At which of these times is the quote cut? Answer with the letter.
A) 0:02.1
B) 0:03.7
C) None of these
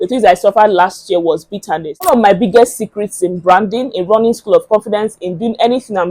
A